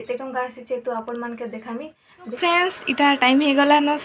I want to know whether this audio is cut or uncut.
cut